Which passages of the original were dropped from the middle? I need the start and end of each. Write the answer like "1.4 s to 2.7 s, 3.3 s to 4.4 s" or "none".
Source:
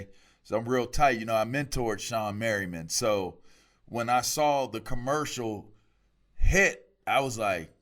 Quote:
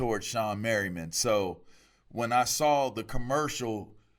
none